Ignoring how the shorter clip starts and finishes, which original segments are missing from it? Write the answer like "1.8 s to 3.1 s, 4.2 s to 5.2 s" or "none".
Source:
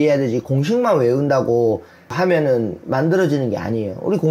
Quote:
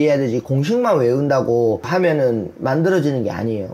1.8 s to 2.1 s